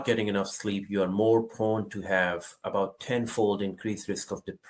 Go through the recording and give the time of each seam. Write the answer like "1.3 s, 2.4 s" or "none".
none